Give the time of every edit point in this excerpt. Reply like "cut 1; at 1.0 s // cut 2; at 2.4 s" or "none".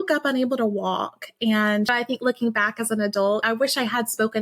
cut 1; at 1.9 s // cut 2; at 3.4 s

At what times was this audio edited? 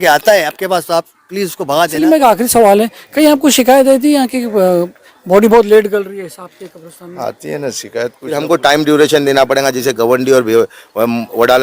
cut 1; at 1.9 s // cut 2; at 8.3 s

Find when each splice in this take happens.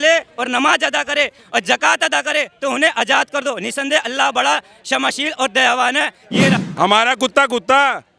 cut 1; at 6.6 s

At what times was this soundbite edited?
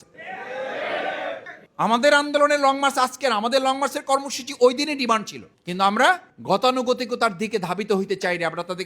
cut 1; at 1.5 s

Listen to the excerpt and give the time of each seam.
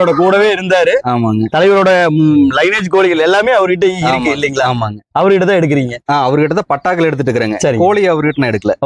none

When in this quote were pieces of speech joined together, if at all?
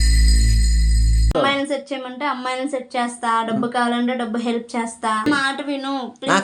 cut 1; at 1.3 s // cut 2; at 5.3 s

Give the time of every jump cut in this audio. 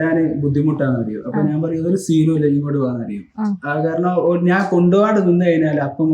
none

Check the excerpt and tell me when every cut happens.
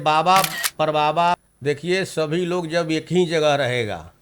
cut 1; at 1.4 s

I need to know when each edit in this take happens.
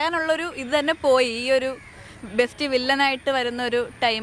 none

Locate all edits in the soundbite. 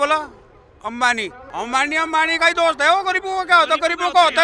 cut 1; at 1.4 s

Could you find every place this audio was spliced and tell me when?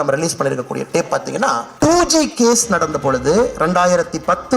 cut 1; at 1.7 s

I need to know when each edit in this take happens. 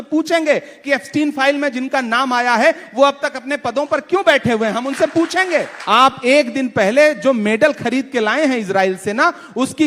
cut 1; at 5.7 s

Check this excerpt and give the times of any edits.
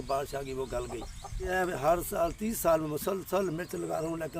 cut 1; at 1.5 s

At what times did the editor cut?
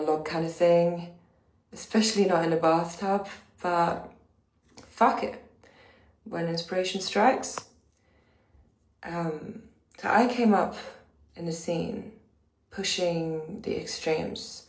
none

